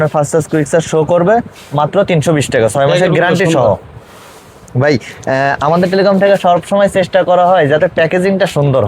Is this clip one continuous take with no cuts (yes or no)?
yes